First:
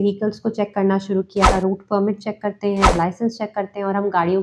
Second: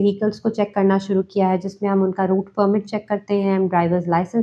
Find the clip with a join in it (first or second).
first